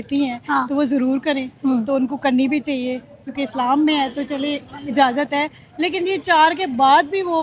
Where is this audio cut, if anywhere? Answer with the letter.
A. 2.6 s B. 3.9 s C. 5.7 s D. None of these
D